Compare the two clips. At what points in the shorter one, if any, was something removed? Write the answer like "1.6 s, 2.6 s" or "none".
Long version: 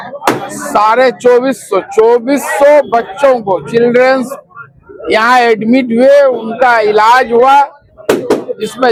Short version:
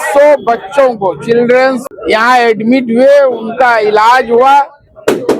1.9 s